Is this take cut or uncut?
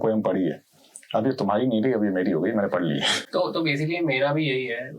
uncut